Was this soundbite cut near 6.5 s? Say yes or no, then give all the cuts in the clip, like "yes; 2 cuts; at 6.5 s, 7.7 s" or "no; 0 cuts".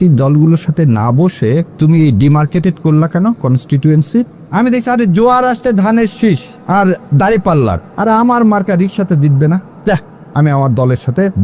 yes; 5 cuts; at 1.7 s, 4.4 s, 6.5 s, 7.9 s, 9.7 s